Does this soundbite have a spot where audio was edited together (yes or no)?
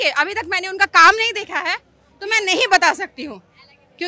no